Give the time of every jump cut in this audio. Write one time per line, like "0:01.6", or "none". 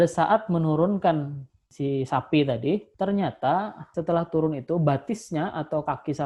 none